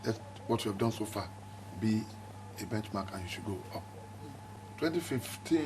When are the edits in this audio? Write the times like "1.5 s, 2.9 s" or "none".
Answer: 4.6 s